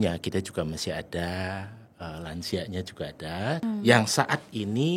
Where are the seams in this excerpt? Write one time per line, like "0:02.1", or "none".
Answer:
0:03.6